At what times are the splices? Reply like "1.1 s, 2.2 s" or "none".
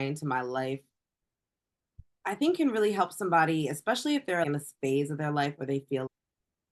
4.4 s